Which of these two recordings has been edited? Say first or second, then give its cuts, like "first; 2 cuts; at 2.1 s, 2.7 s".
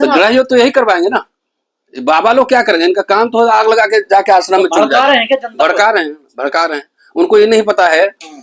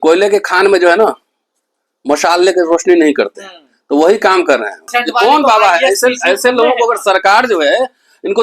second; 1 cut; at 4.9 s